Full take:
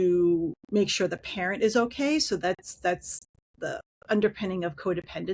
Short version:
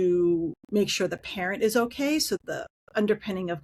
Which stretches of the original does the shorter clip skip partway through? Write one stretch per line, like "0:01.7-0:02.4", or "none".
0:02.4-0:03.5